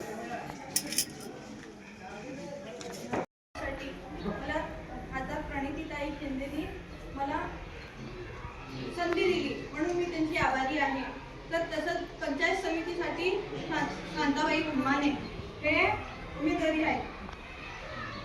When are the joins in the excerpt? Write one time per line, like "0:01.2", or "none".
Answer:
0:03.4